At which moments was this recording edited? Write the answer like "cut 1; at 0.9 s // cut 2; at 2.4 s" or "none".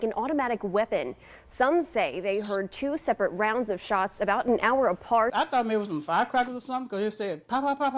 cut 1; at 5.3 s